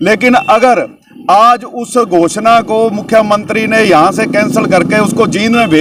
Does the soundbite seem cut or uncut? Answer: uncut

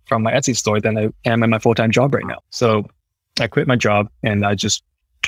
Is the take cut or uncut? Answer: cut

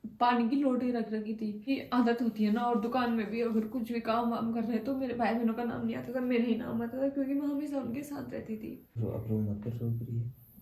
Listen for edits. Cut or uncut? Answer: cut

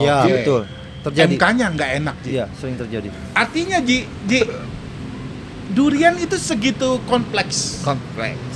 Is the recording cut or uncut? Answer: uncut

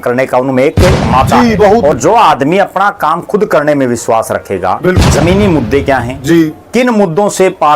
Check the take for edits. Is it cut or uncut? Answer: cut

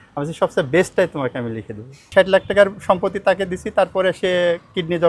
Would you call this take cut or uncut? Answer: cut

